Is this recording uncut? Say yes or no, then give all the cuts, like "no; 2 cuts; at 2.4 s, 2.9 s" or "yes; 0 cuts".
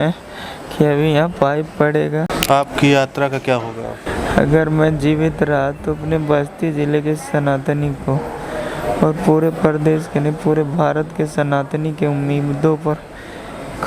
no; 2 cuts; at 2.4 s, 4.1 s